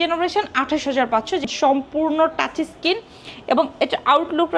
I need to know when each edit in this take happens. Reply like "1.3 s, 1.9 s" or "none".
1.5 s